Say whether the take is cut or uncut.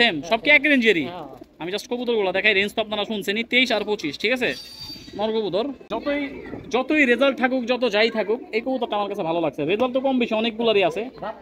cut